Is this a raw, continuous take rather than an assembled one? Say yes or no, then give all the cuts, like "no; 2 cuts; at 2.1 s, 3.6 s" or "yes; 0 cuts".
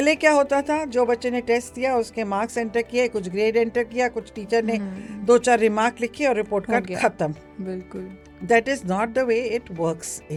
yes; 0 cuts